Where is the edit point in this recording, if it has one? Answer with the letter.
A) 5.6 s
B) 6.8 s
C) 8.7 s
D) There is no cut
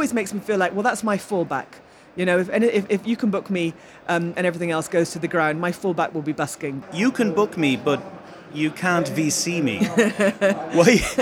B